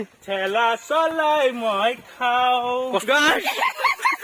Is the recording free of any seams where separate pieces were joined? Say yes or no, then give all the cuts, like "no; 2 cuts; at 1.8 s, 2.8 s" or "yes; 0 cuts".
no; 1 cut; at 3.0 s